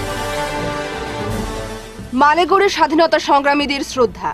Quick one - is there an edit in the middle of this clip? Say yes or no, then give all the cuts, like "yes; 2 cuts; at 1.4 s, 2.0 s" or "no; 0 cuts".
yes; 1 cut; at 1.5 s